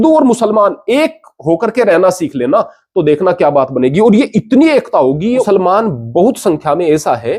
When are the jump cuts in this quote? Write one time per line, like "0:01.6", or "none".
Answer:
0:05.4